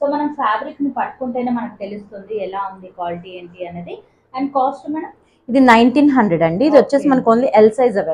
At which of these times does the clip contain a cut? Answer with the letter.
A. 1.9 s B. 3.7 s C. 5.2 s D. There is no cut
D